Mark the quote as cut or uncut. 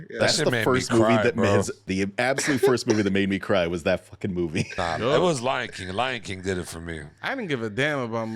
cut